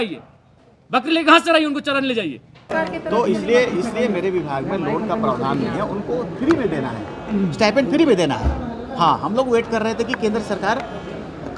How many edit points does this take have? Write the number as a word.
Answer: one